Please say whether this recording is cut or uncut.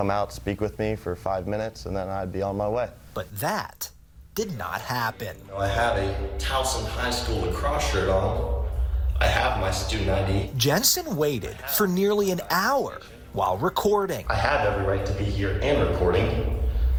uncut